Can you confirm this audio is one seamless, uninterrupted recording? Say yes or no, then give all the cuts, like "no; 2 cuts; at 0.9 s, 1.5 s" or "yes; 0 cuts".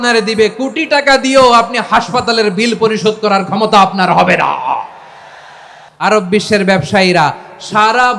no; 1 cut; at 6.1 s